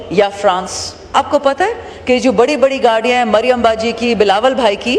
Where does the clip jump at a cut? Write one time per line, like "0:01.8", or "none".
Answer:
0:01.1